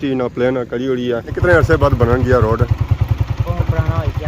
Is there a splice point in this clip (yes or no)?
yes